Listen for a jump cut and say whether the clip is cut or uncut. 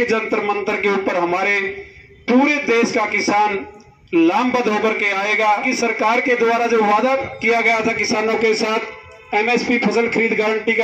cut